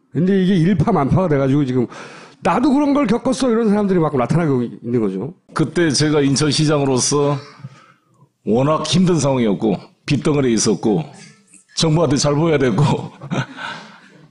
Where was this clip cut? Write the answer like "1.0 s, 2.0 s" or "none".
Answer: 11.7 s